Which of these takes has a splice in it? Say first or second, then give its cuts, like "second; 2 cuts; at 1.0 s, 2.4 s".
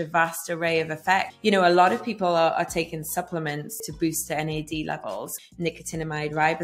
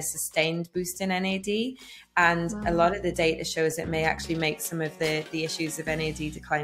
first; 3 cuts; at 1.3 s, 3.8 s, 5.3 s